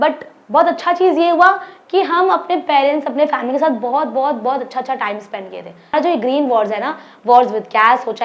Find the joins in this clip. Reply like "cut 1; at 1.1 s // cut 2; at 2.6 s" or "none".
cut 1; at 5.9 s

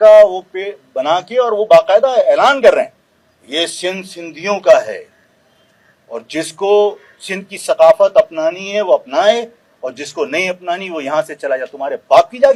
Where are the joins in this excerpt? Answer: none

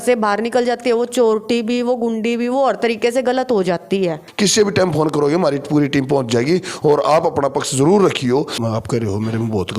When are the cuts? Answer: cut 1; at 4.2 s // cut 2; at 8.6 s

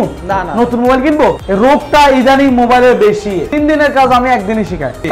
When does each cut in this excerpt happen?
cut 1; at 3.5 s

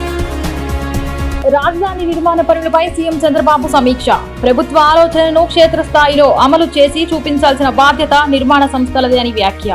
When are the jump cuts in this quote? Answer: cut 1; at 1.1 s

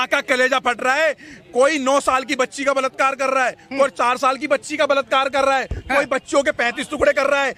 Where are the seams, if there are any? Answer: none

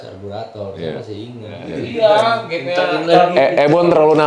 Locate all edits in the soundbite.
cut 1; at 1.7 s

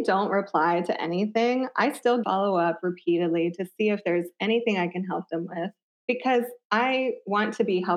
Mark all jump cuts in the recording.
cut 1; at 2.2 s // cut 2; at 5.9 s

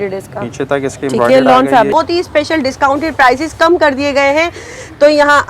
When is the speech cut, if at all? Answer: cut 1; at 1.9 s

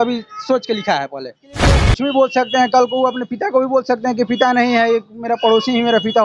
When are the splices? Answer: cut 1; at 1.8 s

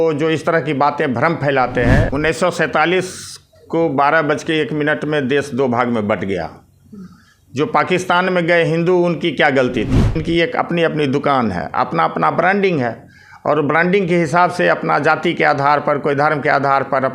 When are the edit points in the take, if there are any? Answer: cut 1; at 2.1 s // cut 2; at 10.2 s

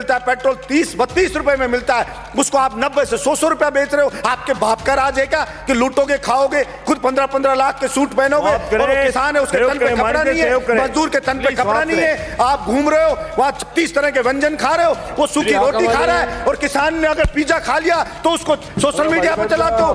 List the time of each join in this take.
none

